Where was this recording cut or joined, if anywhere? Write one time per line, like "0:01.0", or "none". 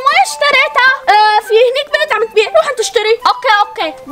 0:00.9
0:03.2